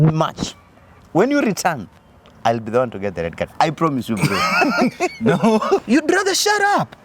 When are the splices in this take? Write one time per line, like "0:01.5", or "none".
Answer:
0:05.8